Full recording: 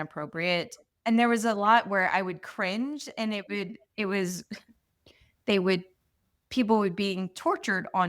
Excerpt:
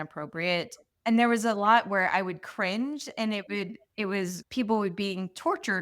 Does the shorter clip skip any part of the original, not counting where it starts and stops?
yes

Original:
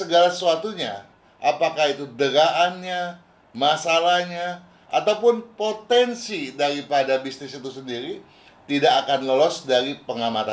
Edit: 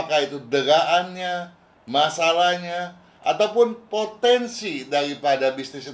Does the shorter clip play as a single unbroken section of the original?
yes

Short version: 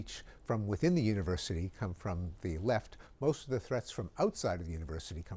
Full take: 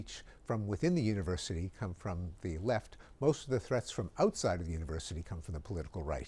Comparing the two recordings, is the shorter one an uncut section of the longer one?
yes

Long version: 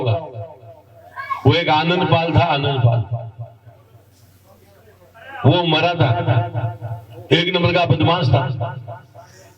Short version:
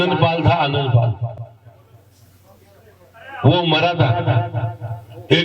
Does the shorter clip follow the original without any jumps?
no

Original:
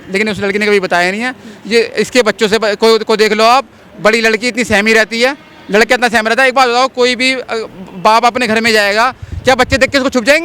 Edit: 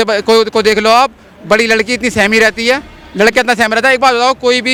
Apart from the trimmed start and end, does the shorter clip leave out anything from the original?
no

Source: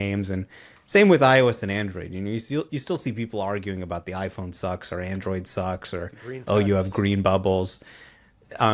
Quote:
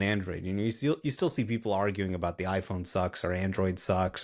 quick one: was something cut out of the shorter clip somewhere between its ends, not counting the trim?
no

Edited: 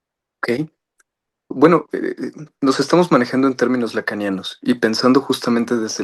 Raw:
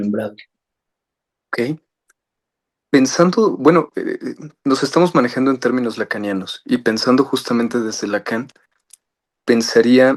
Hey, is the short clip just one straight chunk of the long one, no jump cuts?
no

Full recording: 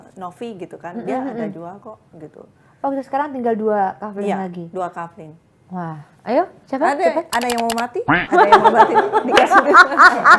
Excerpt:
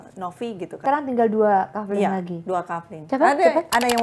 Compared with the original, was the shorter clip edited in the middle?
yes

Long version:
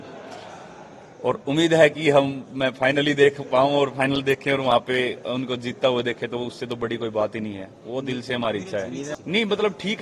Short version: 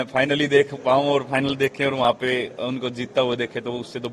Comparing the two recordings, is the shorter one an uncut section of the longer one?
yes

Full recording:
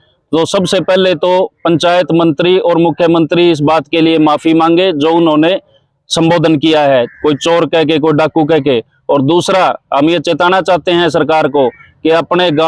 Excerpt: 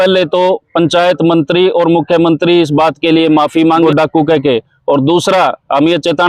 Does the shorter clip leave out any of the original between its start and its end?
yes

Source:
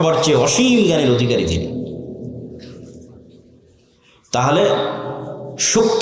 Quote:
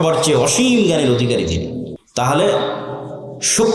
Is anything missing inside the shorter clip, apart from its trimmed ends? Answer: yes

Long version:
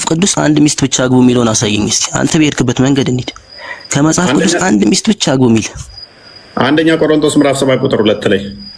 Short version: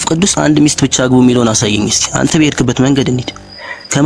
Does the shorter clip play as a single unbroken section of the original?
yes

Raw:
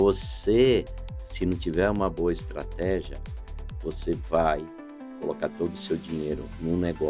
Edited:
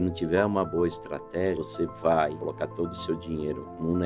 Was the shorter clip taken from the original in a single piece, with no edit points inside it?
no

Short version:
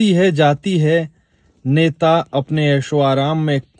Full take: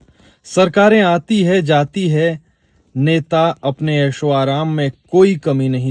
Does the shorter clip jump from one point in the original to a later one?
no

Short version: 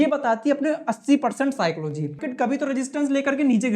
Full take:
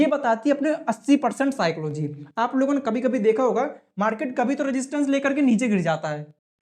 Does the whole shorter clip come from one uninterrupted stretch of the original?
no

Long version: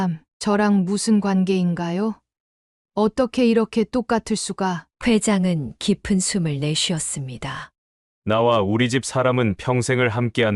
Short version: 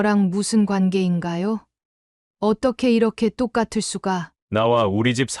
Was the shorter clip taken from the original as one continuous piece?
no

